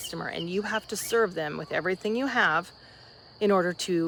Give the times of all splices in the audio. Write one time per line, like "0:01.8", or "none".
none